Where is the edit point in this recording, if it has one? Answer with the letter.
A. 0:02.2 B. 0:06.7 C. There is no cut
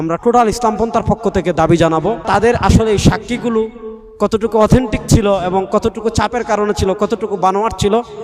A